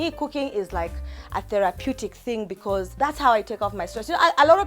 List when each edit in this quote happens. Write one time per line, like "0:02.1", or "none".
0:02.9